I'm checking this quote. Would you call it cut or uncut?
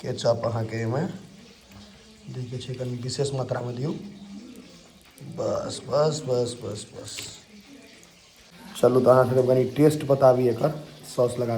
uncut